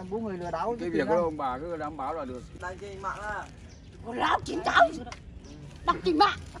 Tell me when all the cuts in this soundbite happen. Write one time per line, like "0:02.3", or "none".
0:02.5